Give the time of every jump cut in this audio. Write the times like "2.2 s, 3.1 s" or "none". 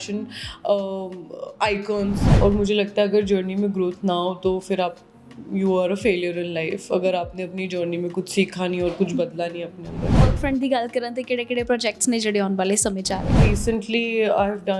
2.3 s, 10.3 s, 13.4 s